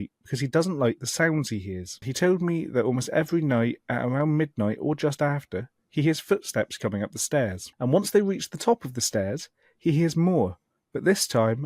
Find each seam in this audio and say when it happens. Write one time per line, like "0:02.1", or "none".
0:02.1
0:07.6

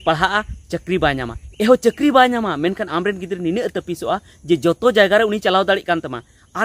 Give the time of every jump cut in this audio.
0:01.4

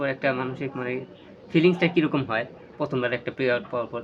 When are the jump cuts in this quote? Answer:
none

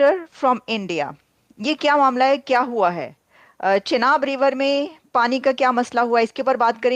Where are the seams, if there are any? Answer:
none

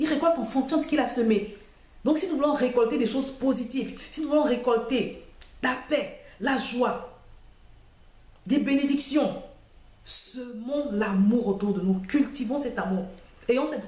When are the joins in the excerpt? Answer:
none

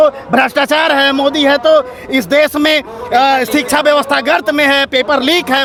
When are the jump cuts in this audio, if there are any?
none

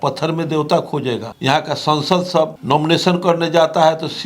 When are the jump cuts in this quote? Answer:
0:01.3
0:02.6

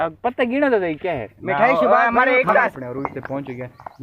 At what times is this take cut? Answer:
0:02.8

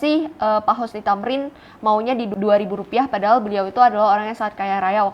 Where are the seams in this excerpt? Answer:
0:02.3

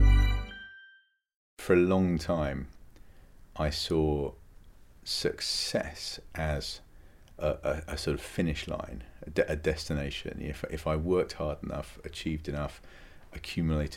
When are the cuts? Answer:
0:01.6

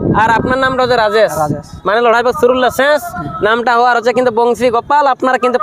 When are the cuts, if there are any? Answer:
none

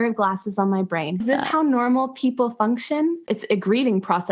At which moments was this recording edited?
0:01.2
0:03.3

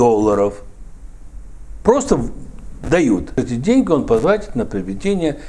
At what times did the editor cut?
0:03.3

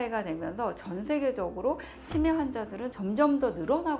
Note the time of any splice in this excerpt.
none

